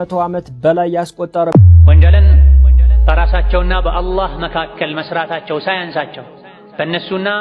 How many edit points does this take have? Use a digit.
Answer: 1